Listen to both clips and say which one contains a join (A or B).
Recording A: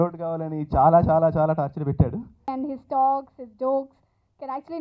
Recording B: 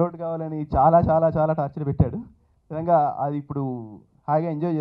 A